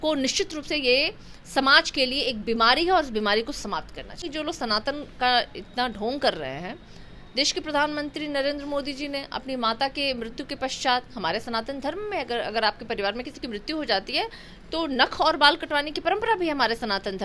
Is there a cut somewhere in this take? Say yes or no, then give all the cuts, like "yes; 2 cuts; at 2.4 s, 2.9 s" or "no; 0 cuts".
yes; 1 cut; at 4.2 s